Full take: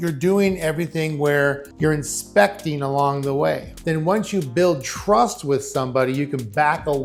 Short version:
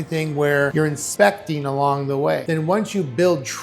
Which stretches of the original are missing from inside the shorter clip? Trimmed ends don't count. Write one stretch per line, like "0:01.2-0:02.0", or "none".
0:01.7-0:02.1
0:03.6-0:03.8